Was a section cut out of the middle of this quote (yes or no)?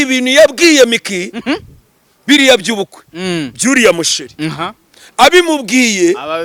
no